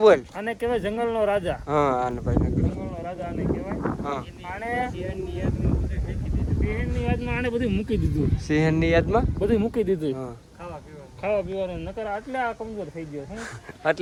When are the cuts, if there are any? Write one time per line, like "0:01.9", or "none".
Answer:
none